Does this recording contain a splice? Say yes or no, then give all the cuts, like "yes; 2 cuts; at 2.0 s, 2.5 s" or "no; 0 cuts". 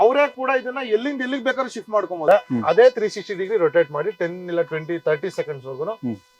yes; 1 cut; at 2.2 s